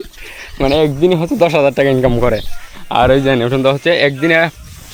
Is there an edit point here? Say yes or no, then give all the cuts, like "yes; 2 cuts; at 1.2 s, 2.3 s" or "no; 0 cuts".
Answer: no; 0 cuts